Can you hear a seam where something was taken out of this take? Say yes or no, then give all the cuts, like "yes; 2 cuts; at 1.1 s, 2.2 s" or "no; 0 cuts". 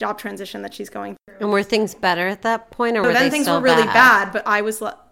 no; 0 cuts